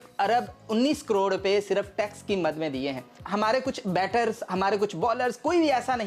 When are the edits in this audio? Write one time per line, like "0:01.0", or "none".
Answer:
none